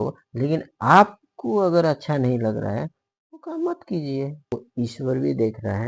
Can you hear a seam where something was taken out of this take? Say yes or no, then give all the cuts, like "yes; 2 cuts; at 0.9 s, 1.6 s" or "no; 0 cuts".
yes; 1 cut; at 4.5 s